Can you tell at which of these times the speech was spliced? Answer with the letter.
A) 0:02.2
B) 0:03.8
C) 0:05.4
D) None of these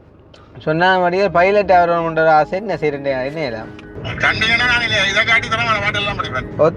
B